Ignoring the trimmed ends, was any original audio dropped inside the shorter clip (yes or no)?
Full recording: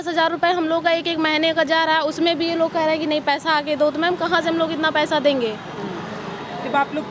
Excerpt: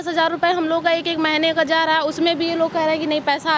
no